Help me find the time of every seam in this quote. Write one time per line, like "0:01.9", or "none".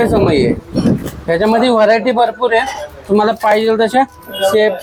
none